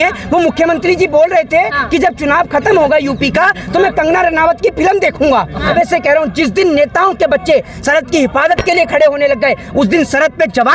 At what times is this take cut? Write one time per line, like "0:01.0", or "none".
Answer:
0:05.7